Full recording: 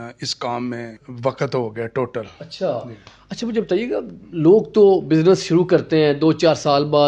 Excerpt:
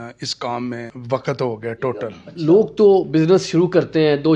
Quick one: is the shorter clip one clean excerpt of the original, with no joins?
no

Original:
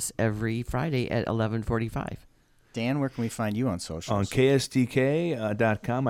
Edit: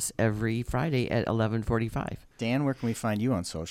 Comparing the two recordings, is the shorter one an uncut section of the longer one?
no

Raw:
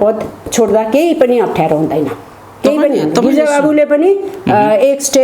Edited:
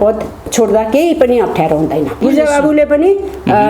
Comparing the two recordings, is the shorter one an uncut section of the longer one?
no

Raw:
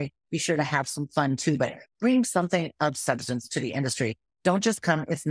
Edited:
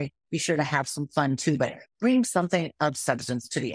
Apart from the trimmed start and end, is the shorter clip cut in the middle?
no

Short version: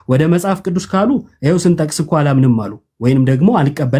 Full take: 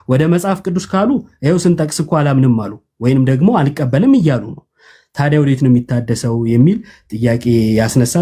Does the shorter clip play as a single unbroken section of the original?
yes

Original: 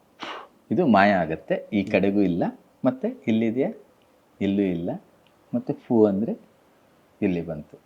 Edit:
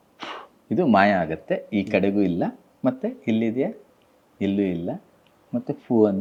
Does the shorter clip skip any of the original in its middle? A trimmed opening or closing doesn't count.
no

